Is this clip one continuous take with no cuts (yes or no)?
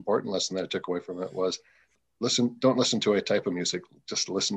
no